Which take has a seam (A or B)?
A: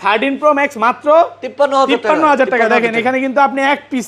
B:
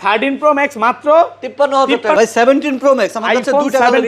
B